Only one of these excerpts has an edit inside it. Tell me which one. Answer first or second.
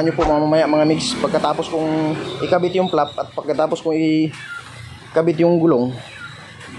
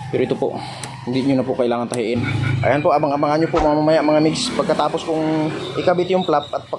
second